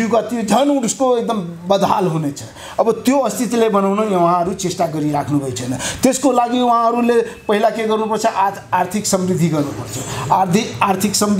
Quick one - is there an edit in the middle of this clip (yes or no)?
no